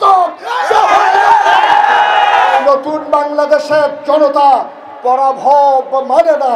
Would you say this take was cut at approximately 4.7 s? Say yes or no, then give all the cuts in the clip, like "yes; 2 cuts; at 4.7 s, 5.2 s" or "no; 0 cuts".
no; 1 cut; at 2.6 s